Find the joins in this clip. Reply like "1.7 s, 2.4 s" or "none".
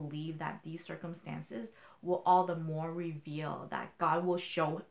3.9 s

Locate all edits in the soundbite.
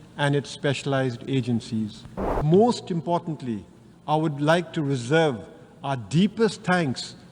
2.4 s

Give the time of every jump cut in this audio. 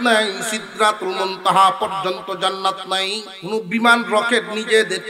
3.3 s

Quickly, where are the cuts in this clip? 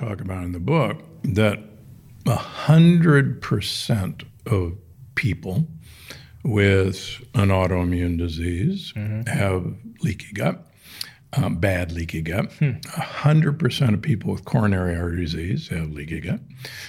none

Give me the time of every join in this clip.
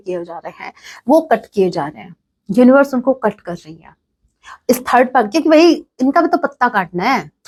none

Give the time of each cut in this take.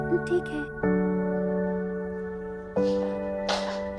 none

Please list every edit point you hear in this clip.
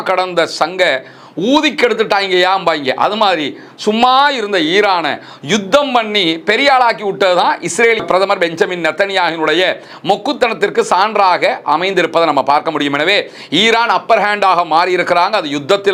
none

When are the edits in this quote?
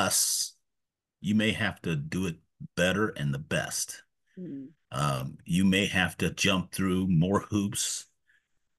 none

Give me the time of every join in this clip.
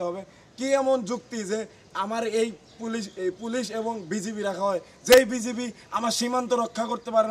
none

